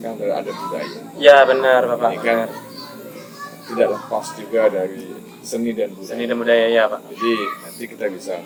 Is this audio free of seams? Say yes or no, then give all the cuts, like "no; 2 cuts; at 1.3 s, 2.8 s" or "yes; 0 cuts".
yes; 0 cuts